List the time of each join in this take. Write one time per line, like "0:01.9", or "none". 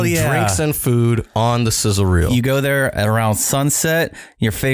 0:02.3

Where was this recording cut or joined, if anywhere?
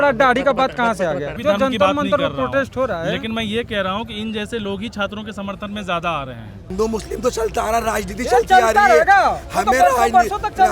0:01.3
0:06.7

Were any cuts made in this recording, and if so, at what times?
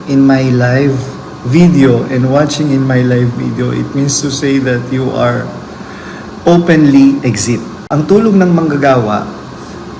0:07.8

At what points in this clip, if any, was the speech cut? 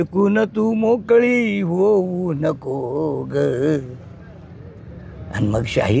none

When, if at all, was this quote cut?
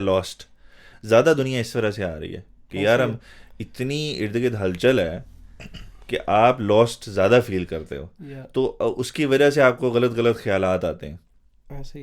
none

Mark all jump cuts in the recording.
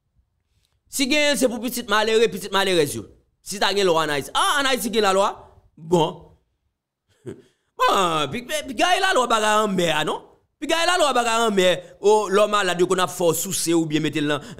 none

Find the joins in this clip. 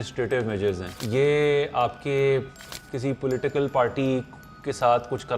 0:00.9

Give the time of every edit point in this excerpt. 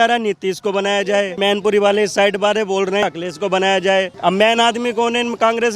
0:01.4
0:03.0
0:04.1

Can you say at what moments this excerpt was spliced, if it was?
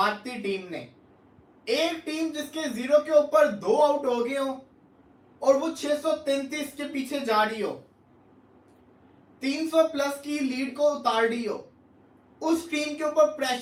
none

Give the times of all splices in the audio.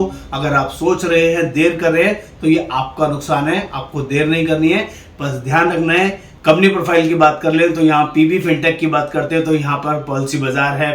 0:06.3

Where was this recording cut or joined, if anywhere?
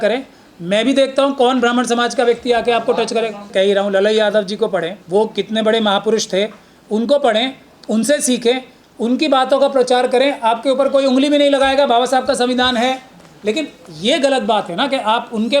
0:03.5
0:05.0

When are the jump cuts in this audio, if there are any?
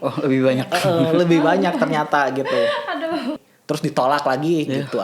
0:03.5

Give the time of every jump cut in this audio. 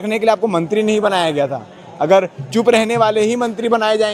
none

